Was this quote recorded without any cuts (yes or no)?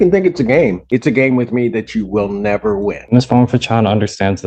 no